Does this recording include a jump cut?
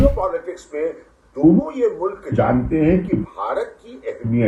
no; 0 cuts

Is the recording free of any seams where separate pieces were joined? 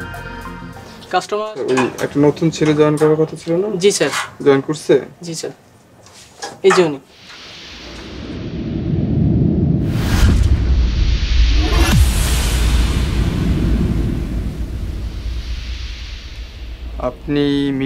no; 1 cut; at 1.4 s

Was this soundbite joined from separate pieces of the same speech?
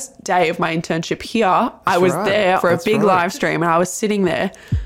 yes; 1 cut; at 2.6 s

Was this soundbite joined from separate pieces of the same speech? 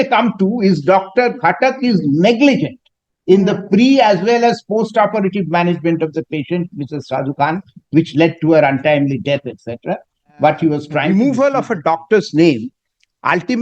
yes; 1 cut; at 11.0 s

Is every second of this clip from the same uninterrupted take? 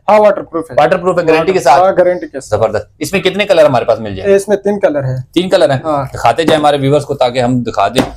yes; 0 cuts

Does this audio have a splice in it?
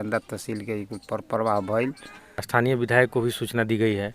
yes; 1 cut; at 2.3 s

